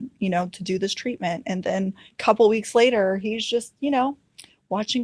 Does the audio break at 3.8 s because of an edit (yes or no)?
no